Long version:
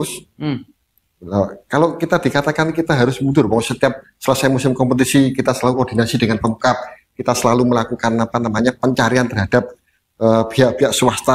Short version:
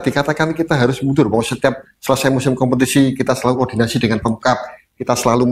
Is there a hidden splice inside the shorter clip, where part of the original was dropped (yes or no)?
no